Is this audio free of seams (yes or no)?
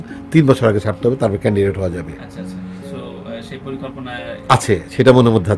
yes